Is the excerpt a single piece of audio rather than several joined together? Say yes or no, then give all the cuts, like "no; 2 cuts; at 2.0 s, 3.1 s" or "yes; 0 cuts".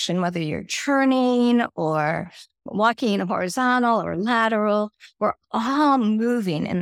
yes; 0 cuts